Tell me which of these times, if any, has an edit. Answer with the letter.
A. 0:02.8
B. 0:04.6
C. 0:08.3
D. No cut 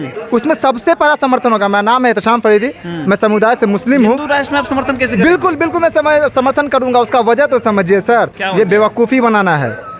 D